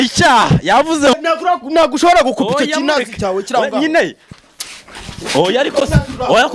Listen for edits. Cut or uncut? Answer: cut